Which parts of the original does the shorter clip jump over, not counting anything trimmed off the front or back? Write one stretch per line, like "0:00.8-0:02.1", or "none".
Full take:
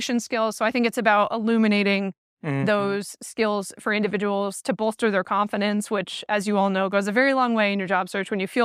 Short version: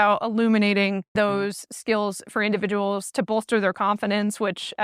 0:02.2-0:02.6